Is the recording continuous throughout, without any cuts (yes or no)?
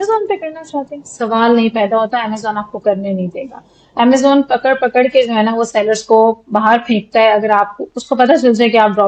yes